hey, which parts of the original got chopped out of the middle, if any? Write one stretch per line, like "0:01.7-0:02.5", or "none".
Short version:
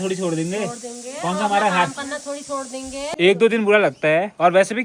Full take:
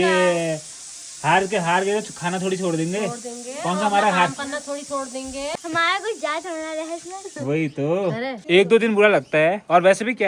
0:05.5-0:08.4